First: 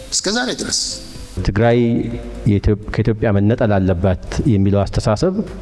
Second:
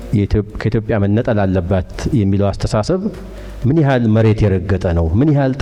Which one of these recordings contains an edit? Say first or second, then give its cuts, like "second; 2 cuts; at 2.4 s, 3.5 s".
first; 1 cut; at 1.4 s